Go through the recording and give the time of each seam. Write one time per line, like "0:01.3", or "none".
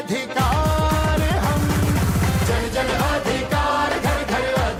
none